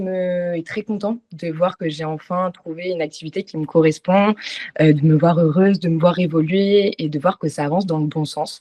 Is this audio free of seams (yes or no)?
yes